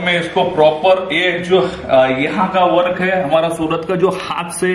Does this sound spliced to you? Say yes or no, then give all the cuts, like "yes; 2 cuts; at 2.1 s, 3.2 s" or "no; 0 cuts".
no; 0 cuts